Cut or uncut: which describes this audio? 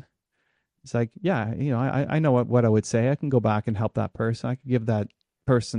uncut